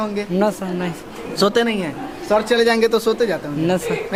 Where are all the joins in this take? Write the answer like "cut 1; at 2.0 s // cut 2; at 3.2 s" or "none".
none